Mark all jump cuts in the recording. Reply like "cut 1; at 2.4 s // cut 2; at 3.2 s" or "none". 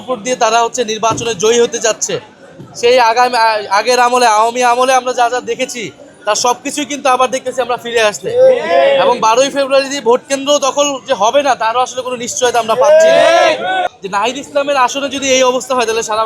cut 1; at 13.9 s